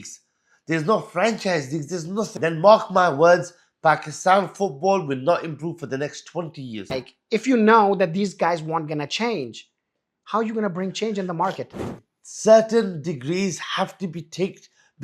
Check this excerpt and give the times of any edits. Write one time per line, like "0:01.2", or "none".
0:02.4
0:07.1
0:11.8